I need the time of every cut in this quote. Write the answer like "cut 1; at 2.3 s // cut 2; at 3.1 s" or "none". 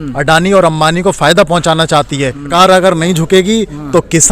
cut 1; at 2.5 s